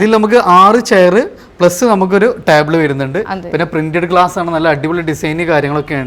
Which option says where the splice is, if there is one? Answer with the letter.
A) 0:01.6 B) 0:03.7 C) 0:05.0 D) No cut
D